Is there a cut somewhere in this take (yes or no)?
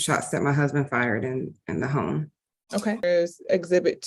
yes